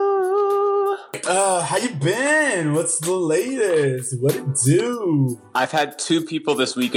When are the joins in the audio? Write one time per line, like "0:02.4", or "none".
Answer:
0:01.2